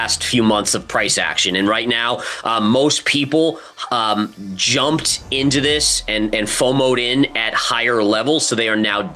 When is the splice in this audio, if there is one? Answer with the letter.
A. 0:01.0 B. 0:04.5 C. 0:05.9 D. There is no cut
D